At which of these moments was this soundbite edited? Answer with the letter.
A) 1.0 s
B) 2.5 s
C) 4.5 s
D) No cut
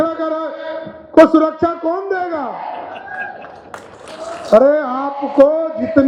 D